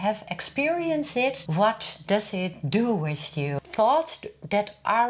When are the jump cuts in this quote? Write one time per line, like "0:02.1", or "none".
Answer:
0:01.4
0:03.6